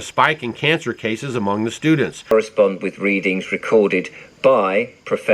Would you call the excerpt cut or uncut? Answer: cut